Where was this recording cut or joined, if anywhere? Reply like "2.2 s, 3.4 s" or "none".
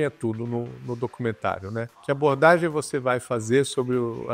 1.9 s